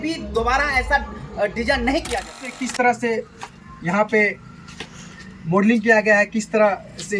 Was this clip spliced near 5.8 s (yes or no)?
no